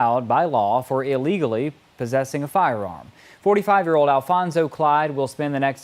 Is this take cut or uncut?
uncut